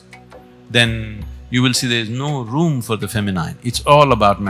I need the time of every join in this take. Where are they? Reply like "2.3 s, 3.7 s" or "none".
none